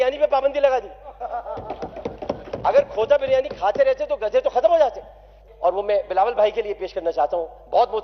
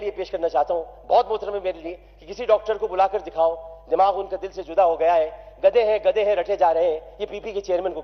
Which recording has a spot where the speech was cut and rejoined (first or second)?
first